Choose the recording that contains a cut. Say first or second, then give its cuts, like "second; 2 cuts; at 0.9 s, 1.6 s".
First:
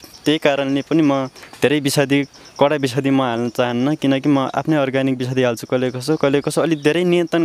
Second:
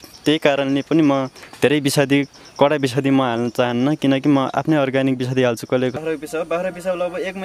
second; 1 cut; at 6.0 s